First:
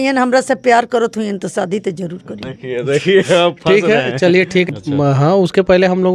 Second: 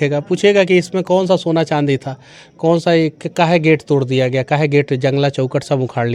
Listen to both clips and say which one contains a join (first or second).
first